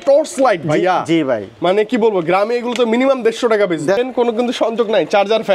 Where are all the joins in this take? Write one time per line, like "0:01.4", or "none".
0:04.0